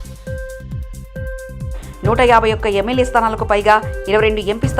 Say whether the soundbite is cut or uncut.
cut